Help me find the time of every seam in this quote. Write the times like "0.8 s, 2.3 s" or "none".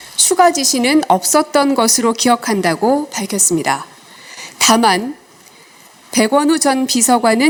none